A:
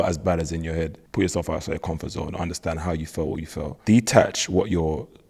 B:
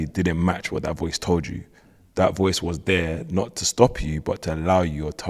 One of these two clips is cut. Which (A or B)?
A